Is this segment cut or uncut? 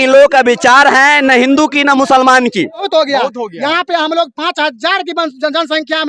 cut